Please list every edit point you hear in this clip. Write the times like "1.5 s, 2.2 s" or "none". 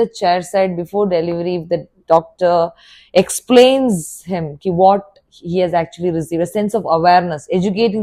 none